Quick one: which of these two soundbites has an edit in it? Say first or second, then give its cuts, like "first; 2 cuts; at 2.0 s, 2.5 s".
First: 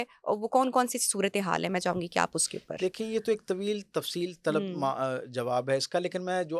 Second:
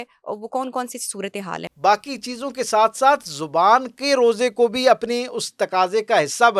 second; 1 cut; at 1.7 s